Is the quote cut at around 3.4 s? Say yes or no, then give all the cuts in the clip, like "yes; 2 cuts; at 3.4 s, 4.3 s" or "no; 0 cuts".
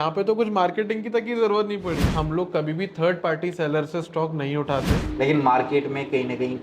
no; 2 cuts; at 2.1 s, 4.9 s